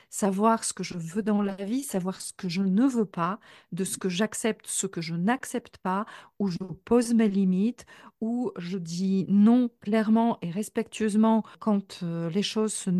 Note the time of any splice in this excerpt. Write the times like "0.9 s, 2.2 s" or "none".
9.8 s, 11.5 s